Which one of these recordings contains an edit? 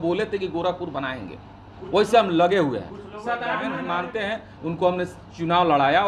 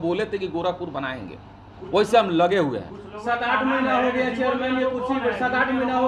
first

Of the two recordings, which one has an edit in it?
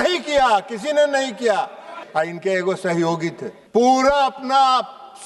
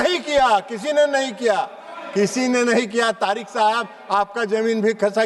first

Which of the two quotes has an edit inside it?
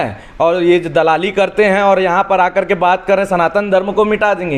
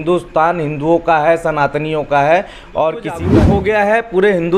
second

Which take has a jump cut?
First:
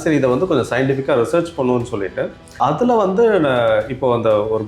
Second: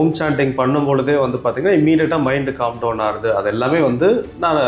first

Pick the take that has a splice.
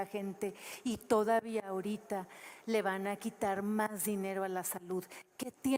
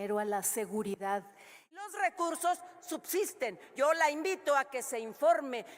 second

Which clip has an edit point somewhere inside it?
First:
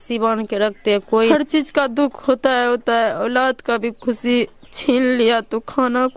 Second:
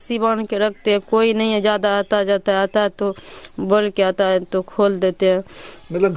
first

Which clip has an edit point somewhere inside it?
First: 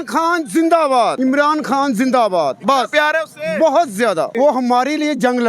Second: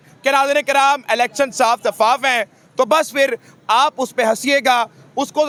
first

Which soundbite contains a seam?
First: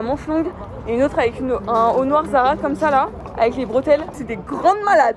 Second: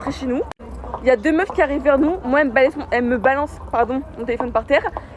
first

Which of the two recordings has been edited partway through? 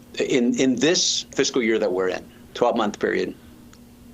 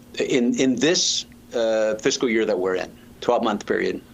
first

